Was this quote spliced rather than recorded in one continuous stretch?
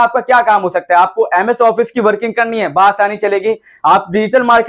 no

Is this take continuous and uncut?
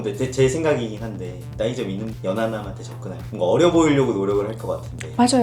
yes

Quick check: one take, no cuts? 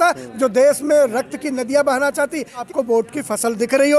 no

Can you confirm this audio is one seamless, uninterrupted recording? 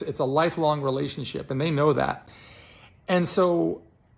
yes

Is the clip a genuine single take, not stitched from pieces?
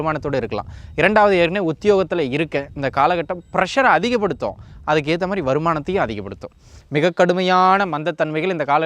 no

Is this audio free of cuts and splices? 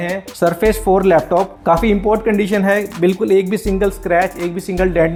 yes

